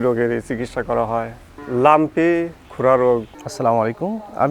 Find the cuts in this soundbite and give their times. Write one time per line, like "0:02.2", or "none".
0:03.3